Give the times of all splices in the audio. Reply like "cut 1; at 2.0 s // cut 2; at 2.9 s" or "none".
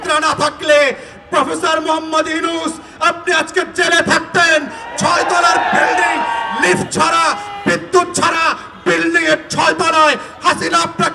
none